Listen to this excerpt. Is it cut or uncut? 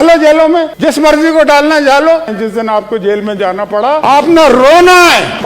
cut